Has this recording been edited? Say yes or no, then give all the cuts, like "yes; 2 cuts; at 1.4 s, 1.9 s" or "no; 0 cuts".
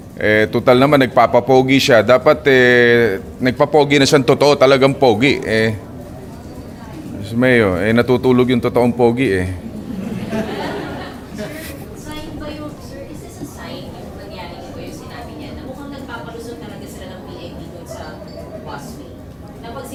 no; 0 cuts